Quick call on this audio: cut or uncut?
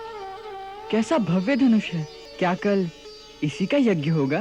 cut